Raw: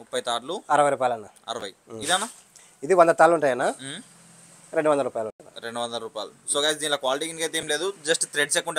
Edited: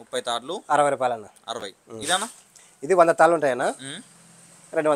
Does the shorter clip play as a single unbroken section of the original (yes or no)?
yes